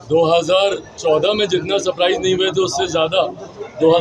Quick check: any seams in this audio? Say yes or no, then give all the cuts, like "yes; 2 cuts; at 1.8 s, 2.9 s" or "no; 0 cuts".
no; 0 cuts